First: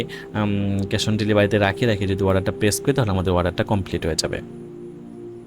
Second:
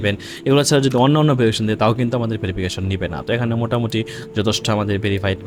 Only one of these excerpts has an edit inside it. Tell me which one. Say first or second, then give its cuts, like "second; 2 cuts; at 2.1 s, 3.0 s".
first; 1 cut; at 4.4 s